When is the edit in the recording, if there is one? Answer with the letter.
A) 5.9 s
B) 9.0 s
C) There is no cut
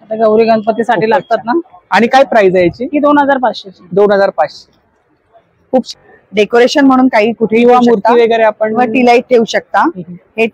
A